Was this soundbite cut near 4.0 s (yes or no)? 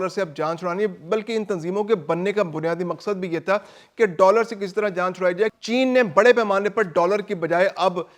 no